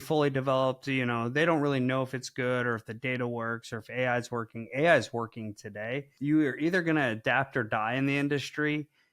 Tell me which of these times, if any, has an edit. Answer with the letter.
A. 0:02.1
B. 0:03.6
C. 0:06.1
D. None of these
C